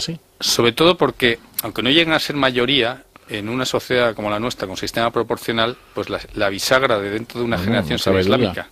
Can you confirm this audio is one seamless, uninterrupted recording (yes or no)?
yes